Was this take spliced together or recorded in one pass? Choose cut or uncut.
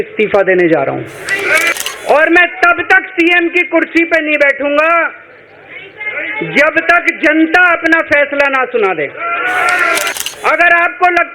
cut